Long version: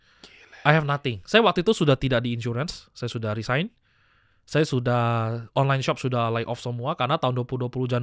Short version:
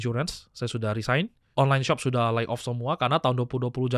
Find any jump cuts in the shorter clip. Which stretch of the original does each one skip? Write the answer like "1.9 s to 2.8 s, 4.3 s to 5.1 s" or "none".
3.8 s to 5.4 s

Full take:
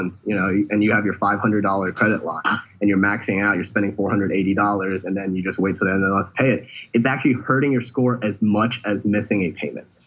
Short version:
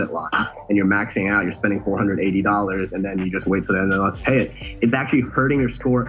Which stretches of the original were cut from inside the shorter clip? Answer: none

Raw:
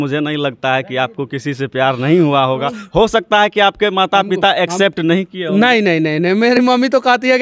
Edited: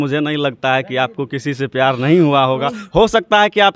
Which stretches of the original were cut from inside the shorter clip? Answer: none

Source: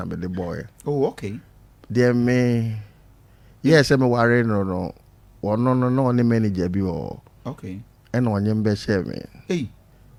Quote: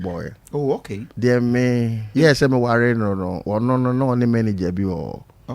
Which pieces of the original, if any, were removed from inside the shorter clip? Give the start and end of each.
1.3 s to 1.7 s, 2.7 s to 3.5 s, 4.8 s to 5.3 s

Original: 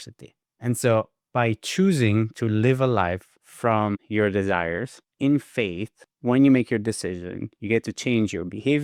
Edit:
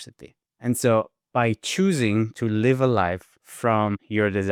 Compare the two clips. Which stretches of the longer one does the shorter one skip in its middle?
none

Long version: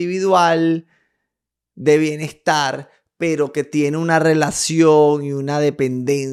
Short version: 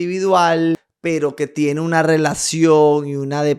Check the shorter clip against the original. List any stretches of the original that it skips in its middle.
0.9 s to 3.1 s

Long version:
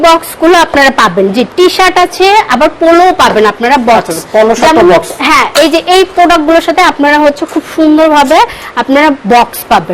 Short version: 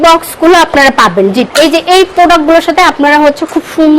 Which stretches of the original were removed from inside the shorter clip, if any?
1.5 s to 5.5 s

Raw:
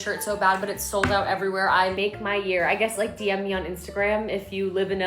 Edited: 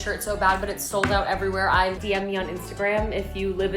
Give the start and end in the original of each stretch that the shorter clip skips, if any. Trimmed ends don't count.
2.0 s to 3.1 s

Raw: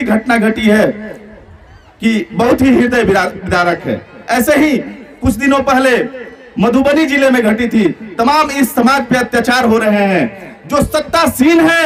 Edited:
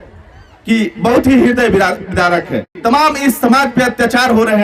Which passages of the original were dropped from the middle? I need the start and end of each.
4.1 s to 8.1 s

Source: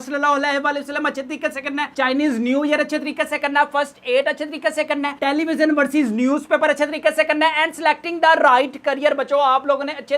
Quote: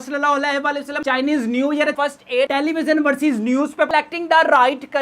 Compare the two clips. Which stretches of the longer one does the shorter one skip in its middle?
1.0 s to 1.9 s, 3.3 s to 5.1 s, 6.6 s to 7.8 s

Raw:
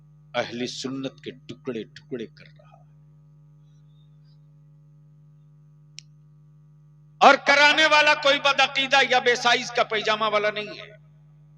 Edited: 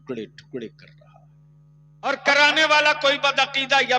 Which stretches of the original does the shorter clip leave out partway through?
3.8 s to 7.4 s

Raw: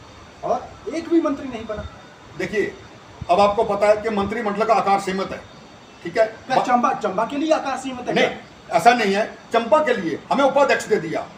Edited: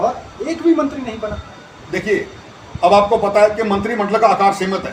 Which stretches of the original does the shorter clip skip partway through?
none

